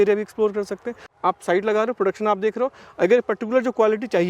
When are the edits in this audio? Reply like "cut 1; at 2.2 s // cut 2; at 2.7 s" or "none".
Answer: cut 1; at 1.1 s